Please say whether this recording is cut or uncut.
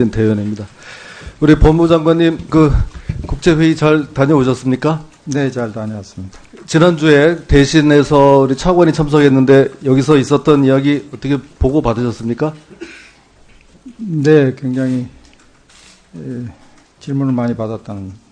uncut